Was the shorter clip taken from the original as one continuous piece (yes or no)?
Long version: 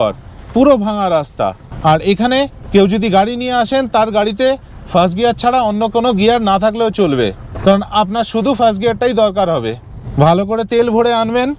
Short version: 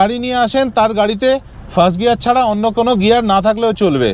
yes